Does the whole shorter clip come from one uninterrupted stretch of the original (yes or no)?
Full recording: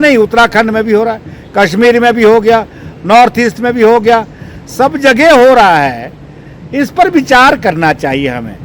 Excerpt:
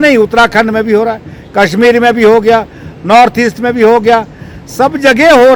yes